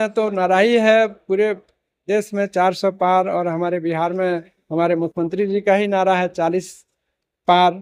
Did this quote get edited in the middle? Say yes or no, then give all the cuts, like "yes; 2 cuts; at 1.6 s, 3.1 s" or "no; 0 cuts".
no; 0 cuts